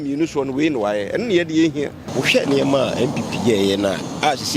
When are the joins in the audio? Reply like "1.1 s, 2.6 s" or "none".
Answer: 2.0 s